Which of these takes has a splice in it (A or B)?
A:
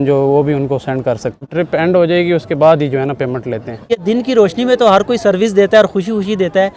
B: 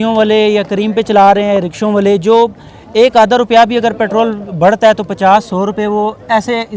A